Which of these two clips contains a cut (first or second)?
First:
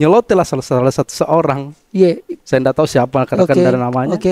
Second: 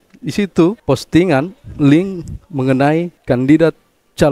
second